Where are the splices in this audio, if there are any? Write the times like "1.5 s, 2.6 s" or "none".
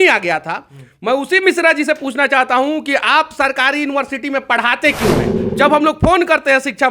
5.4 s